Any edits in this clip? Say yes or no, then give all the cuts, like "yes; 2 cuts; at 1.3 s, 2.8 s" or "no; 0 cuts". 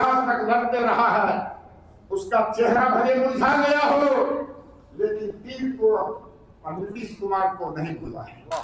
no; 0 cuts